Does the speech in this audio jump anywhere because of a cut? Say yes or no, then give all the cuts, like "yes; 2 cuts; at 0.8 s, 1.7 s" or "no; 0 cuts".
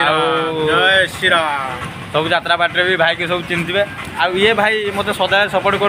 no; 0 cuts